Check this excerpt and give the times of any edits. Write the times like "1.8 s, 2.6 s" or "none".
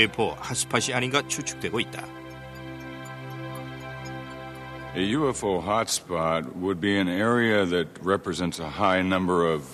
none